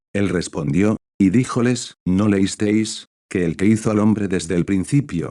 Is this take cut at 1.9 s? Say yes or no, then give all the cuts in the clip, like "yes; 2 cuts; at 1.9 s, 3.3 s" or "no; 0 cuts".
yes; 1 cut; at 1.9 s